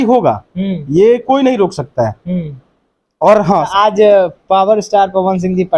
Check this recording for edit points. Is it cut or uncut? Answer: cut